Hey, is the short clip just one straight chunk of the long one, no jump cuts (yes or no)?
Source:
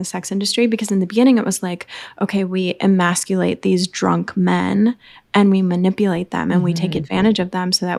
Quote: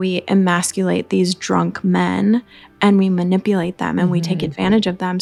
yes